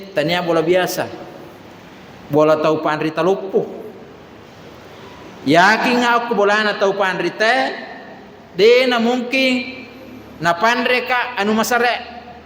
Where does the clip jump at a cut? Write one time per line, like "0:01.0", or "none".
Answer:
none